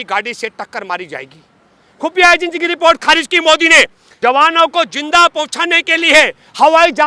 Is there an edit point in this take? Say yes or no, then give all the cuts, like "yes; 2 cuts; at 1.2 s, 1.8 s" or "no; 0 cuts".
yes; 1 cut; at 4.0 s